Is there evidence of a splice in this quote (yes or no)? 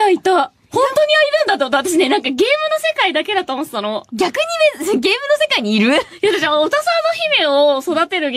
yes